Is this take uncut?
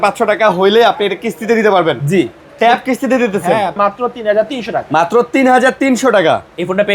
no; 1 cut; at 3.8 s

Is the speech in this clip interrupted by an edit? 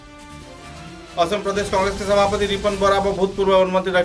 yes; 1 cut; at 1.0 s

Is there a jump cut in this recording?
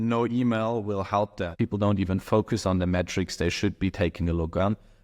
yes; 1 cut; at 1.5 s

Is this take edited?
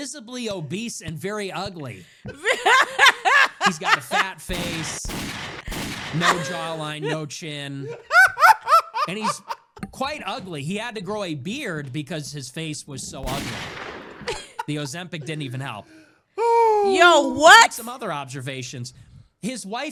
no; 0 cuts

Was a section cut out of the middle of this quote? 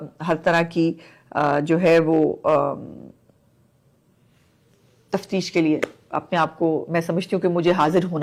no; 0 cuts

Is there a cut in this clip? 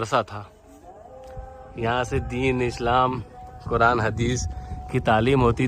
no; 0 cuts

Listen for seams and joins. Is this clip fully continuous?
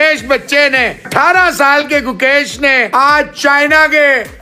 no; 2 cuts; at 1.1 s, 2.9 s

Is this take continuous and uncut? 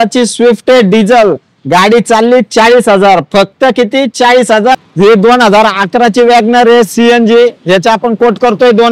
no; 1 cut; at 4.8 s

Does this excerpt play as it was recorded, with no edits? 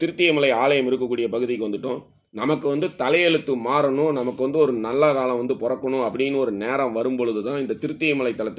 yes; 0 cuts

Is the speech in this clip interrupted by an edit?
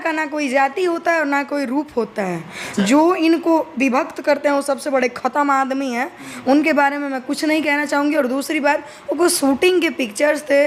no; 0 cuts

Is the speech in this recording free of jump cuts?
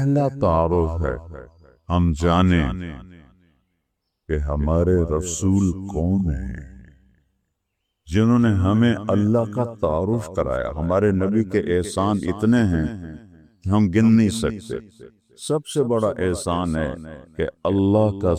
yes; 0 cuts

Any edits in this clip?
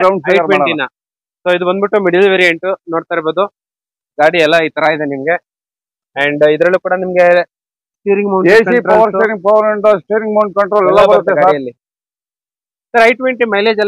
no; 0 cuts

